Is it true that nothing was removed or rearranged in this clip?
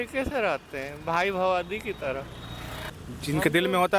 no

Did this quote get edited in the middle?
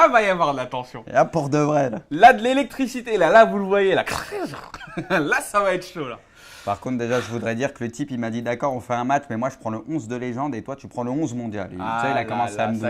yes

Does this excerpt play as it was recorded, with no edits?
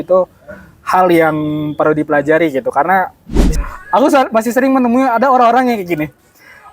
no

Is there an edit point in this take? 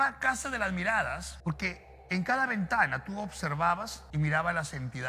yes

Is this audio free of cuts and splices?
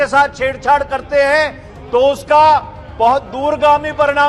yes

